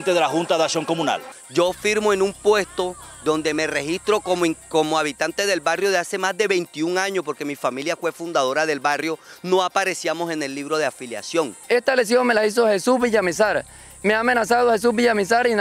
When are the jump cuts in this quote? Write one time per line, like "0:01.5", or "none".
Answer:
0:01.2
0:11.6